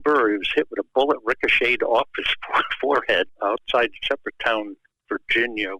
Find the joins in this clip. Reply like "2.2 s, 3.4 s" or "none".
3.3 s